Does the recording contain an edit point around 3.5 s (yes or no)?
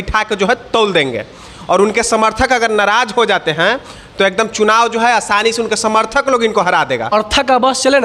no